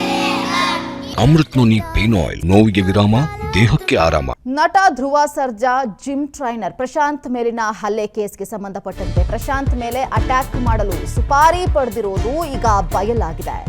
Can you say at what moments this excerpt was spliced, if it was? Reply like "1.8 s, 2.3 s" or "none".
1.0 s, 2.3 s, 4.3 s

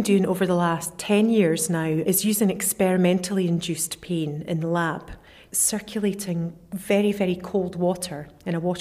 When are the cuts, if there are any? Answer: 0.9 s, 2.0 s, 5.5 s

